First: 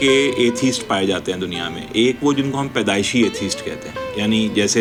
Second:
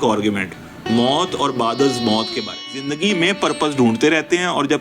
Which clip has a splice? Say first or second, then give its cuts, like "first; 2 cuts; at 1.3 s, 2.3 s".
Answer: second; 1 cut; at 2.9 s